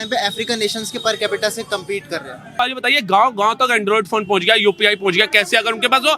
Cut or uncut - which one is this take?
cut